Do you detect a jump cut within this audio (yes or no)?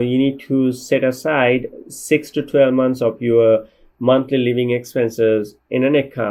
no